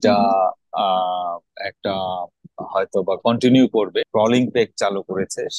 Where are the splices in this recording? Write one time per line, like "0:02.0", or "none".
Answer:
0:04.1